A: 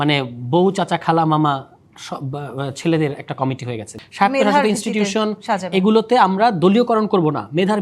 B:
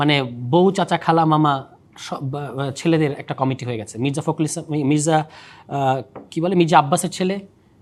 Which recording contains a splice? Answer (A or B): A